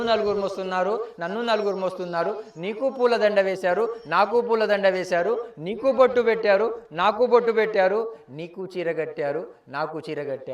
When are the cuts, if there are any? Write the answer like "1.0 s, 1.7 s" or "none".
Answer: none

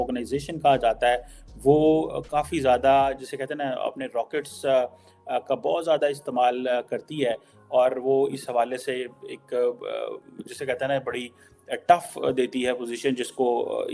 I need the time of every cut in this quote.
none

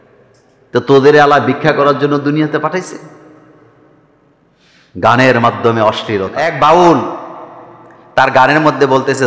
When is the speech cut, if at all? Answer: 6.4 s

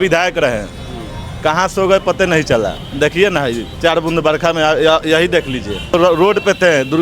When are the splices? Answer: 2.8 s, 5.9 s

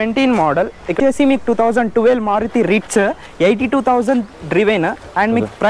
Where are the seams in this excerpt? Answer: 1.0 s

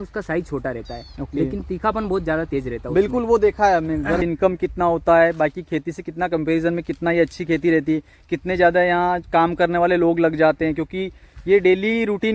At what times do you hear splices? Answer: 4.2 s

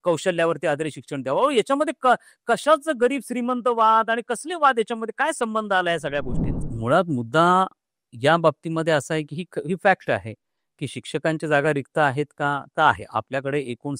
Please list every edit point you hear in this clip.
6.7 s

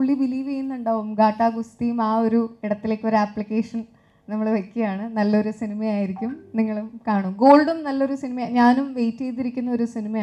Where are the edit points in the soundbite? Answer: none

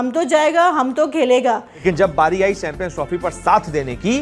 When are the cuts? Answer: 1.8 s

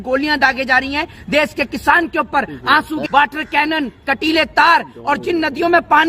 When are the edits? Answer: 3.0 s

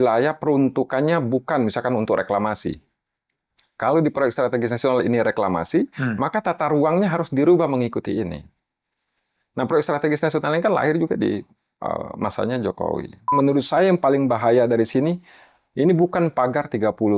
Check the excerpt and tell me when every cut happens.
13.2 s

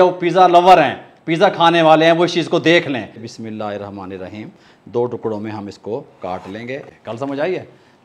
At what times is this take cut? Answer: 3.2 s, 6.9 s

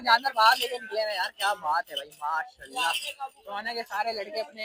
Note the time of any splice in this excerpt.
none

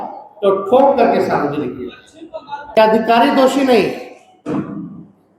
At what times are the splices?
2.8 s

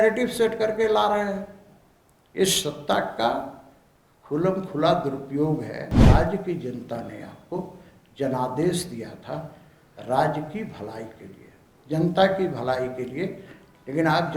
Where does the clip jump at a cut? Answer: 6.0 s

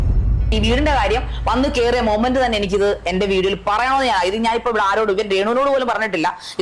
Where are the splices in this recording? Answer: none

